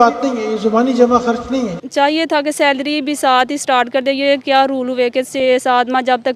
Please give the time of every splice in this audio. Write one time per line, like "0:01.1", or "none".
0:01.8

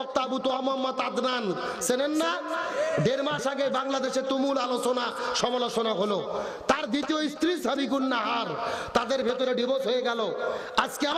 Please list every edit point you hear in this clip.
none

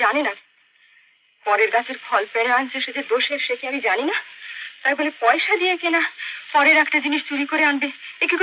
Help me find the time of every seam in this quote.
none

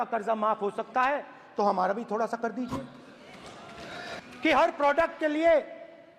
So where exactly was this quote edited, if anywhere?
0:04.2

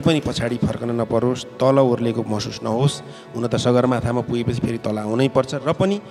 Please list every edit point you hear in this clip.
none

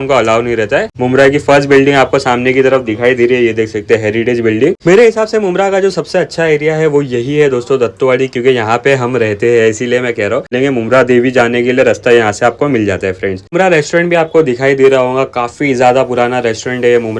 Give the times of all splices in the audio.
0:00.9
0:04.8
0:10.5
0:13.5

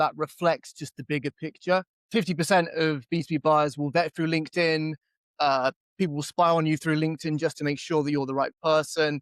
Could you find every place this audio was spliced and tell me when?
0:02.0

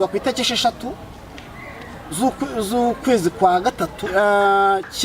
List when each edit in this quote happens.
0:04.1

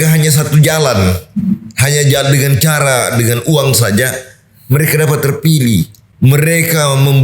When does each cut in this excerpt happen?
0:06.0

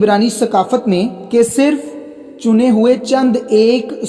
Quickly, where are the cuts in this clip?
0:01.2

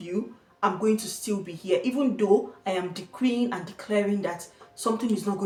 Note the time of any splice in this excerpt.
none

